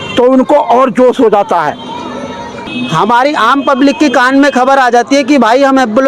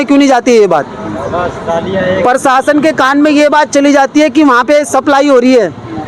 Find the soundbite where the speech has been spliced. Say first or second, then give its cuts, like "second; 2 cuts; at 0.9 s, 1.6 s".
first; 1 cut; at 2.5 s